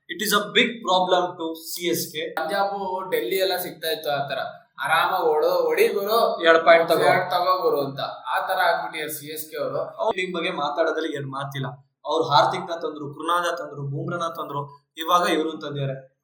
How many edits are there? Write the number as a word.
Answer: two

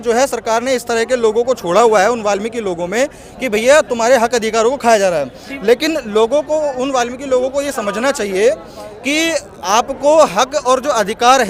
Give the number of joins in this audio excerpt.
zero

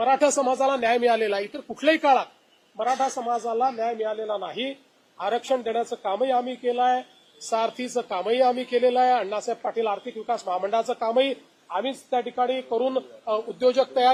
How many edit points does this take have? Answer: zero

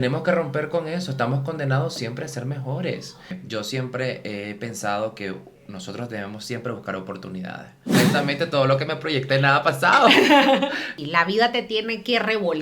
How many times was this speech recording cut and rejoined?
three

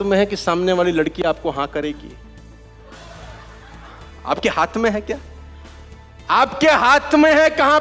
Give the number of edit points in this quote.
zero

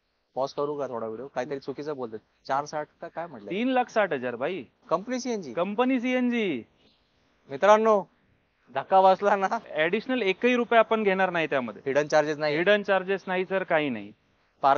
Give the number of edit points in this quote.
one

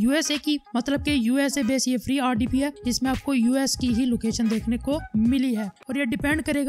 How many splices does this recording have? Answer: one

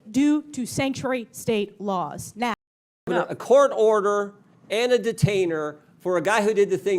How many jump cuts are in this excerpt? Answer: one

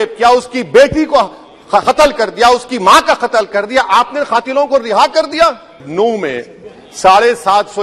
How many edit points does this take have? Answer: one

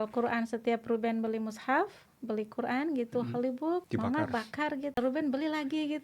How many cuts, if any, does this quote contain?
two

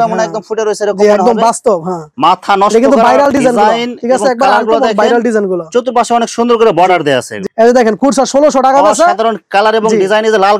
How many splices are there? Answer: two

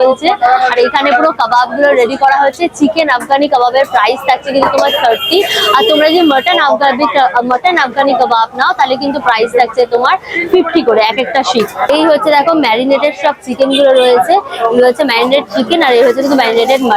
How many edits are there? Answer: zero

